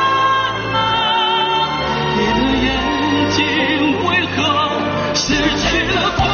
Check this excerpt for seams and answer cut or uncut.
uncut